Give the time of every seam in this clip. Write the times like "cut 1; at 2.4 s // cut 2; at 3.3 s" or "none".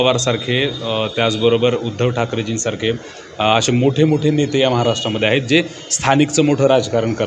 none